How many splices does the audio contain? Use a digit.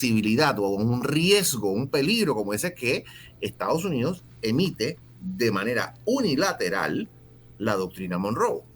0